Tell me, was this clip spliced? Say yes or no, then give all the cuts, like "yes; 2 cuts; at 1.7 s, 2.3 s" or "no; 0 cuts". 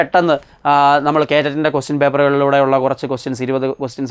no; 0 cuts